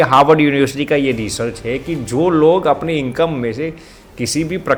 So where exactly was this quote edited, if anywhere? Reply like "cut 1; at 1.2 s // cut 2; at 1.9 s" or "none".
none